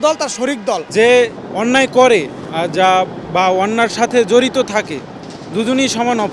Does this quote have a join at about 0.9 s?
yes; 3 cuts; at 0.9 s, 1.4 s, 2.4 s

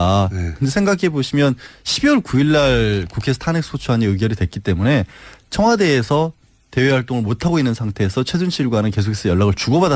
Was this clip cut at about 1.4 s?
yes; 1 cut; at 1.4 s

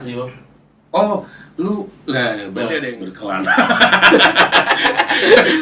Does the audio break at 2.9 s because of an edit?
yes; 1 cut; at 2.9 s

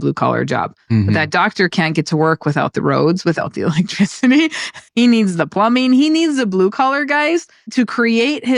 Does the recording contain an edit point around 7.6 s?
yes; 2 cuts; at 4.8 s, 7.6 s

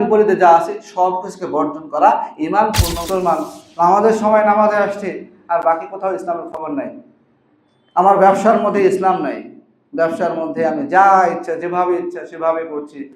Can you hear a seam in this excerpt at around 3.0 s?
yes; 1 cut; at 3.0 s

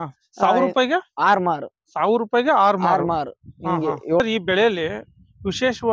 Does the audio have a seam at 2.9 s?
no; 1 cut; at 4.2 s

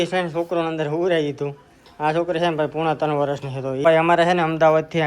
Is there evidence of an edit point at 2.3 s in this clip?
no; 1 cut; at 3.8 s

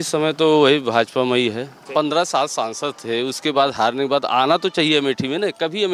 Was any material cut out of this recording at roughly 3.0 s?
no; 1 cut; at 1.8 s

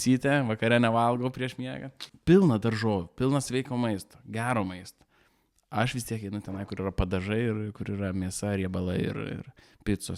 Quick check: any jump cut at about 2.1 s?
yes; 1 cut; at 2.1 s

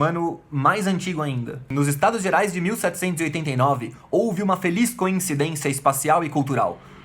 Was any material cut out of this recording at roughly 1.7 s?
yes; 1 cut; at 1.7 s

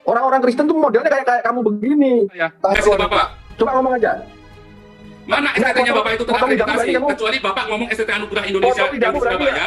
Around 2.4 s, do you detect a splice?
yes; 1 cut; at 2.4 s

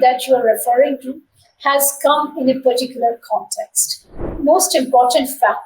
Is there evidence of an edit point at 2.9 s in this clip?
no; 1 cut; at 4.3 s

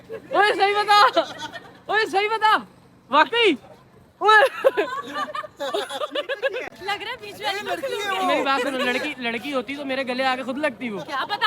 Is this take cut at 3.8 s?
no; 1 cut; at 6.8 s

